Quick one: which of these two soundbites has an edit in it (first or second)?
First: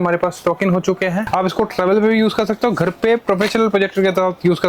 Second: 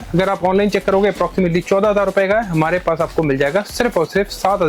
first